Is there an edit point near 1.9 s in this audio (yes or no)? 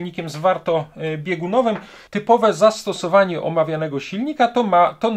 yes